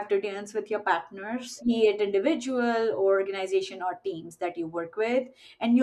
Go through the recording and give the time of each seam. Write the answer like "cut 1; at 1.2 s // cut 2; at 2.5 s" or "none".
cut 1; at 1.5 s